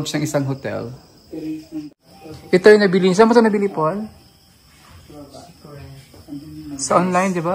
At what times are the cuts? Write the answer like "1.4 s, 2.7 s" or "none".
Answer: 1.9 s